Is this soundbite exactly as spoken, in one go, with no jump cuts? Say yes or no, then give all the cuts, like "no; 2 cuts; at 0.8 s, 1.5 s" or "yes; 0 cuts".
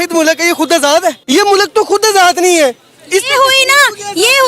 no; 1 cut; at 1.2 s